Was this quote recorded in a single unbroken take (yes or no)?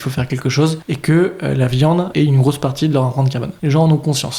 no